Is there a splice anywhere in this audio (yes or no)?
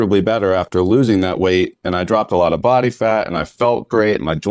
no